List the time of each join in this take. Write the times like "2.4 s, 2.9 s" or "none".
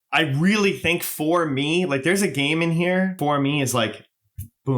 3.1 s